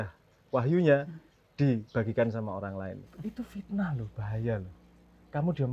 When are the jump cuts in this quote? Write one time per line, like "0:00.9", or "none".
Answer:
0:03.1